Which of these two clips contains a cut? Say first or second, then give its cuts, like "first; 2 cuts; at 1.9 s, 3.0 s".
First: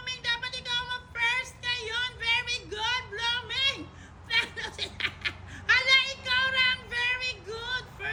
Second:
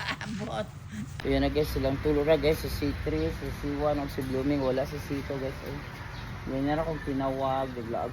second; 1 cut; at 1.1 s